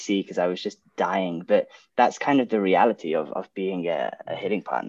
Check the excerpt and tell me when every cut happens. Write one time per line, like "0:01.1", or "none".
none